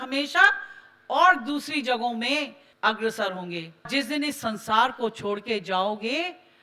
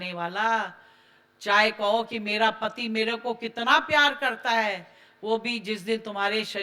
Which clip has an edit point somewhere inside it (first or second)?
first